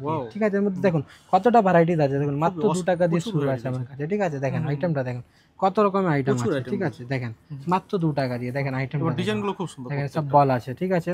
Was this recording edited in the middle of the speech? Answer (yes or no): no